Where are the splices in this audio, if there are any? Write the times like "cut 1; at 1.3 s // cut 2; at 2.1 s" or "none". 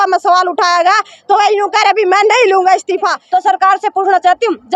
cut 1; at 3.2 s